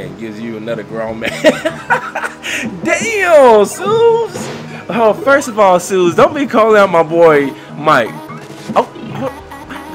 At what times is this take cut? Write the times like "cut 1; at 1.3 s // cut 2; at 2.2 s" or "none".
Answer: none